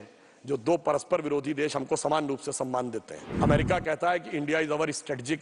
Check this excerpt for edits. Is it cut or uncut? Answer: cut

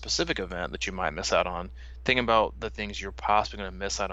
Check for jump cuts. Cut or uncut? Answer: uncut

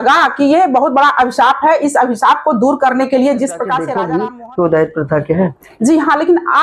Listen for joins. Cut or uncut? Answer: cut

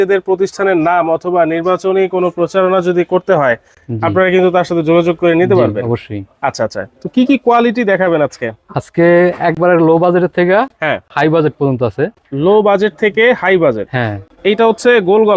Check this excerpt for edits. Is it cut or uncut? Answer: uncut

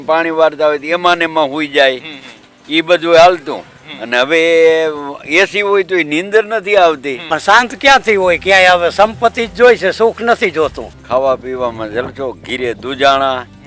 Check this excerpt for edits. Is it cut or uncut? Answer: cut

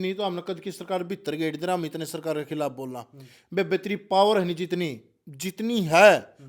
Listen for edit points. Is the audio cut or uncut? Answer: uncut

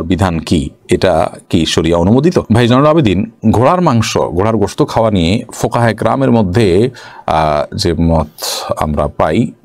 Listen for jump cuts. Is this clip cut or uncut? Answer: uncut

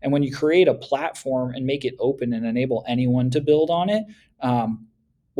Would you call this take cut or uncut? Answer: uncut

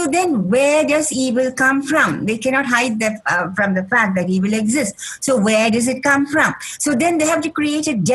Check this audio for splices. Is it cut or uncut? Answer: uncut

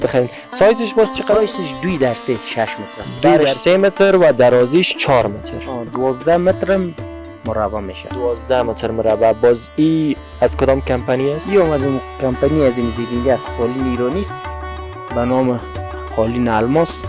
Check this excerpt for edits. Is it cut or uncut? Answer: cut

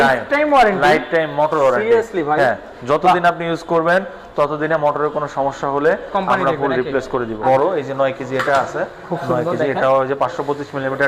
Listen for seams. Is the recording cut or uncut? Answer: cut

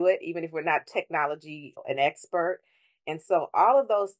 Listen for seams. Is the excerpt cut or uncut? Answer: cut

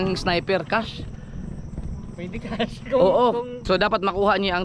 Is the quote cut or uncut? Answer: cut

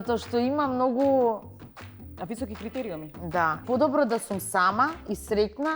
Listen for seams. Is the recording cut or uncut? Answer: cut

